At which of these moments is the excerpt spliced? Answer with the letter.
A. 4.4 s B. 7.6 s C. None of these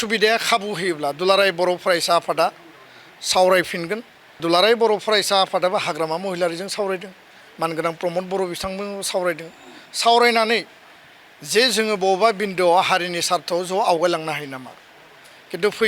A